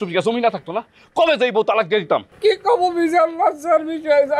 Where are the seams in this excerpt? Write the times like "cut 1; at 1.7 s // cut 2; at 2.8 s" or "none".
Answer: cut 1; at 2.3 s